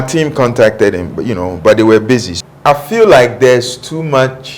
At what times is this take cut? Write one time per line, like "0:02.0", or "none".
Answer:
0:02.4